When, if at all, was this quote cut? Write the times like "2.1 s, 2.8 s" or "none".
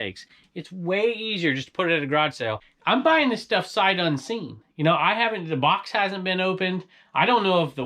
2.7 s